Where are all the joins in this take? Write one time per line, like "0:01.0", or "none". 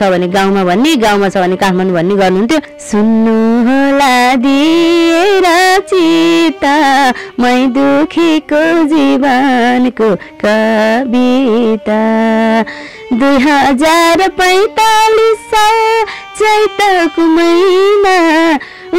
0:02.8